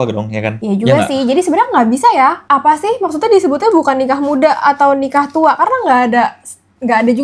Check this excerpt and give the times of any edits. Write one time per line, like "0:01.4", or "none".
none